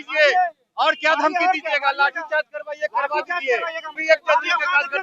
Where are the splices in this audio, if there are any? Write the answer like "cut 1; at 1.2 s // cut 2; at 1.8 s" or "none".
cut 1; at 4.0 s